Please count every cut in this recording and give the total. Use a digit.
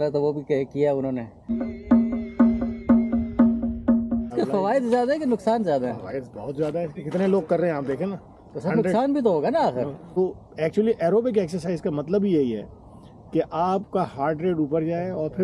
2